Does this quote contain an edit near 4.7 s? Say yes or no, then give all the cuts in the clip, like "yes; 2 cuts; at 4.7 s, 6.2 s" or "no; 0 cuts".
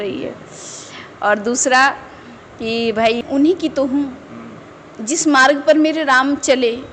no; 1 cut; at 3.2 s